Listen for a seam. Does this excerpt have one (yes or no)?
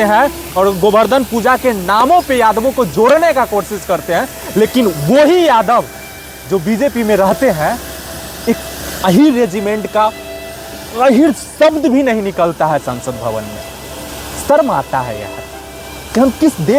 no